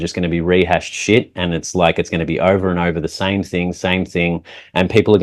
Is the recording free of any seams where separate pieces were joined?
yes; 0 cuts

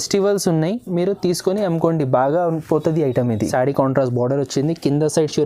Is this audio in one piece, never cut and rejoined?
no; 1 cut; at 3.5 s

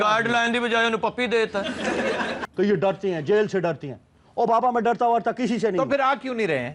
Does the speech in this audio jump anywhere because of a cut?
yes; 1 cut; at 2.4 s

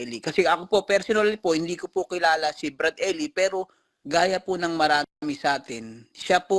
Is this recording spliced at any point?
no; 0 cuts

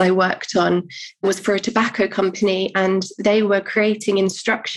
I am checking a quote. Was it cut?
yes; 1 cut; at 1.2 s

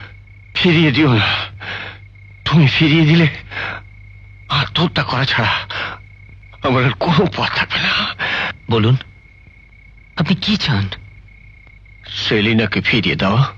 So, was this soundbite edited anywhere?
no; 0 cuts

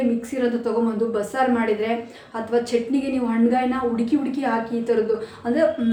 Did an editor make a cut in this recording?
no; 0 cuts

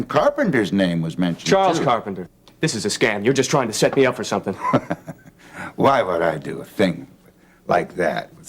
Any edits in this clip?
yes; 1 cut; at 2.2 s

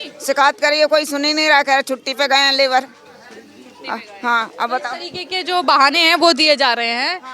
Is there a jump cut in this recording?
no; 0 cuts

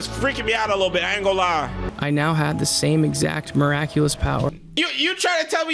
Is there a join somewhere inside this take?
yes; 2 cuts; at 1.8 s, 4.7 s

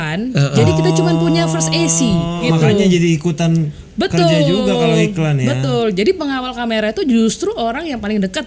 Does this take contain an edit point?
yes; 1 cut; at 2.4 s

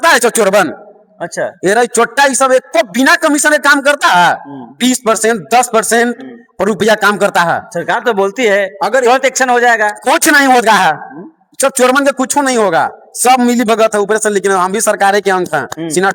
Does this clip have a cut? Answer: no; 0 cuts

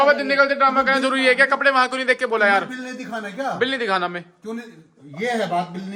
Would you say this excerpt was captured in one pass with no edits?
yes; 0 cuts

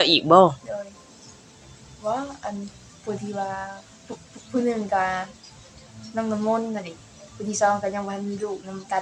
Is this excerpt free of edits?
yes; 0 cuts

